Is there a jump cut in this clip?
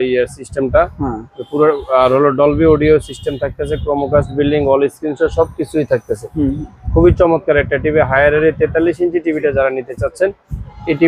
no; 0 cuts

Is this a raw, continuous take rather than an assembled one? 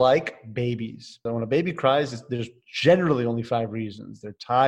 no; 1 cut; at 1.3 s

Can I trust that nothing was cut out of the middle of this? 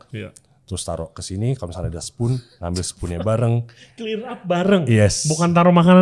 yes; 0 cuts

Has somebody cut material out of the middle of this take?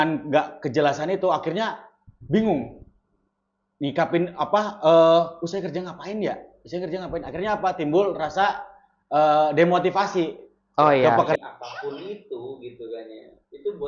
yes; 1 cut; at 11.4 s

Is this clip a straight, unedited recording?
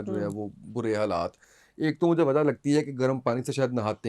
yes; 0 cuts

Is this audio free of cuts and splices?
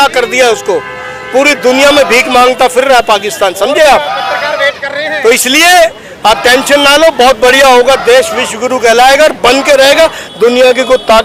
yes; 0 cuts

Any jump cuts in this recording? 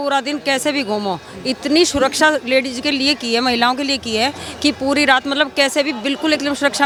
no; 0 cuts

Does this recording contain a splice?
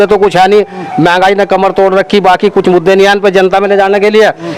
no; 0 cuts

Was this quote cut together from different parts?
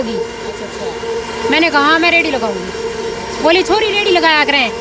no; 0 cuts

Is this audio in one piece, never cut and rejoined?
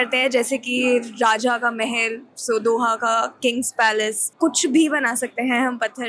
no; 1 cut; at 4.2 s

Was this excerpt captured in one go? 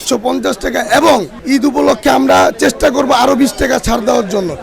no; 1 cut; at 1.3 s

